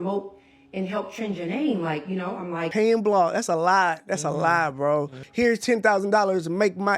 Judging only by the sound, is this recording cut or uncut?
cut